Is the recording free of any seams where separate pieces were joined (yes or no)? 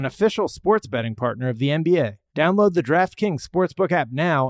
no